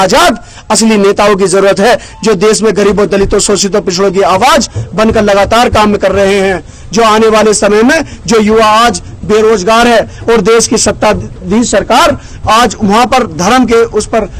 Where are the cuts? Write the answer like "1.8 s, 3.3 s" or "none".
none